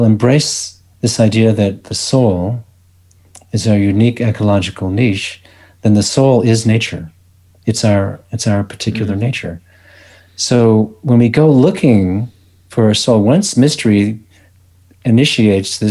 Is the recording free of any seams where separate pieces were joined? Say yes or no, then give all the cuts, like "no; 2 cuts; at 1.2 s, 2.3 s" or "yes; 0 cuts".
yes; 0 cuts